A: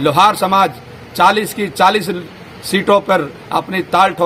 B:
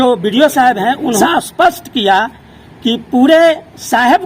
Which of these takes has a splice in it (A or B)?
B